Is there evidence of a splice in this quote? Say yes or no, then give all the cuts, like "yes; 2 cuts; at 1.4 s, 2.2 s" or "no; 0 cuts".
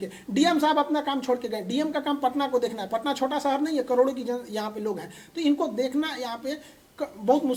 no; 0 cuts